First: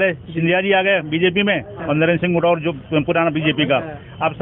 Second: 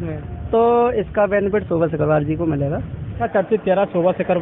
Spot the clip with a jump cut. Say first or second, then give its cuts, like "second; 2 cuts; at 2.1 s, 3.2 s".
second; 1 cut; at 3.2 s